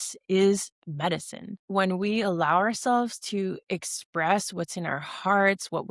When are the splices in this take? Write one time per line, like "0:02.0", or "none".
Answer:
0:01.6